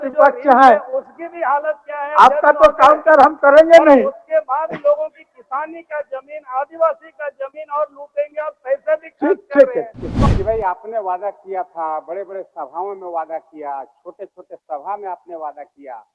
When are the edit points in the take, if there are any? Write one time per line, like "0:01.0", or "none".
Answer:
0:10.2